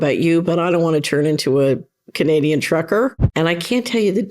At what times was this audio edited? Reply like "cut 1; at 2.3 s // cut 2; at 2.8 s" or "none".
cut 1; at 3.2 s